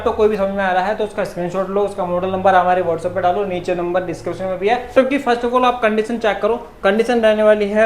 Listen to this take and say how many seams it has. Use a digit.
1